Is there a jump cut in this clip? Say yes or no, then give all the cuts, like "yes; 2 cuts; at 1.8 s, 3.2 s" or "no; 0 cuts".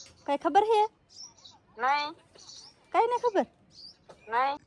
no; 0 cuts